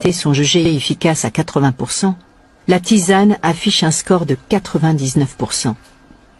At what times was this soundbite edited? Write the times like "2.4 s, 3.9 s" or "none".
none